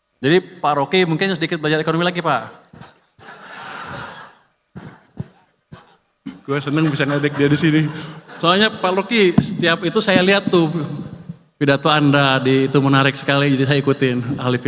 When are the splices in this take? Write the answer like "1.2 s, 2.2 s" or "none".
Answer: none